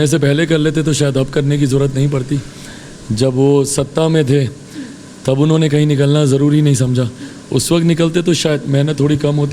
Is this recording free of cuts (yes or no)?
yes